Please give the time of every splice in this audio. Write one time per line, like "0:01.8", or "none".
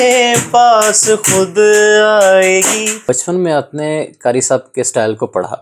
0:03.0